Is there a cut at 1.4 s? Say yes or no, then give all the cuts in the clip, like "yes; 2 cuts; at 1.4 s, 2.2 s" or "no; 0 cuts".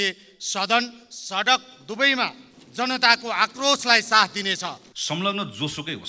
no; 1 cut; at 4.9 s